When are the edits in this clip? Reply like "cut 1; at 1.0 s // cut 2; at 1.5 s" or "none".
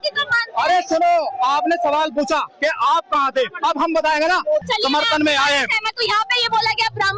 cut 1; at 4.7 s